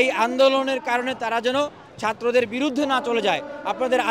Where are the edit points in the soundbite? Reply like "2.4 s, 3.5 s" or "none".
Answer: none